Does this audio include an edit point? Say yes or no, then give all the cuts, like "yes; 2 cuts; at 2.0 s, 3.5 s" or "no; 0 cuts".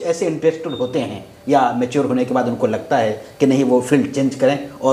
no; 0 cuts